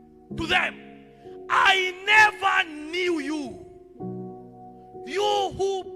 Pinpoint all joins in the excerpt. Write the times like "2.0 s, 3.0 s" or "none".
3.5 s, 4.9 s